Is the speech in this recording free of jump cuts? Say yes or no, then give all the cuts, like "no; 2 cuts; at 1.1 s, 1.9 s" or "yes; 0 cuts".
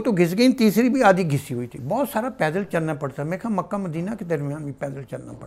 yes; 0 cuts